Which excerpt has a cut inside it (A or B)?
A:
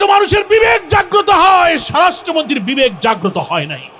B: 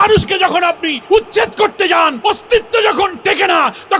B